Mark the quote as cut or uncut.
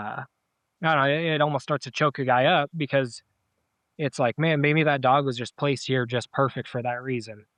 uncut